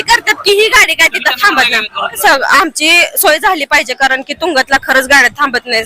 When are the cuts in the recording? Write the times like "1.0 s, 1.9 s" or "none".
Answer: 2.2 s